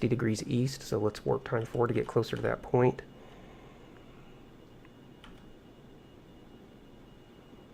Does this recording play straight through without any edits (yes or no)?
no